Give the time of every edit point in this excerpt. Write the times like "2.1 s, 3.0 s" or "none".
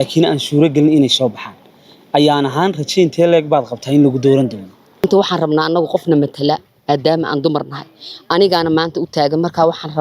5.0 s